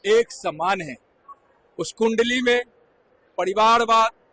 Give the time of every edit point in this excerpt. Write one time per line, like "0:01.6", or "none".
none